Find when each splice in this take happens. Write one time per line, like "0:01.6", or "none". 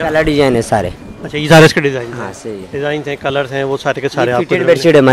none